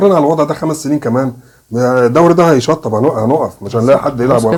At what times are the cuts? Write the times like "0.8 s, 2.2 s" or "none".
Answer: none